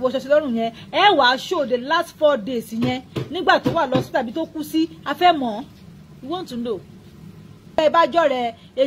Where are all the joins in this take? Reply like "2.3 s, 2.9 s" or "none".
7.8 s